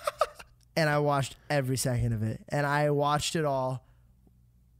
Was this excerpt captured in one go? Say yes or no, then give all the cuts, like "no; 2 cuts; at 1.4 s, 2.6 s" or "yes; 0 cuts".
yes; 0 cuts